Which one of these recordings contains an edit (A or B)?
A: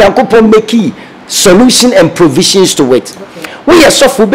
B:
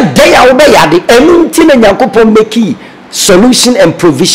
A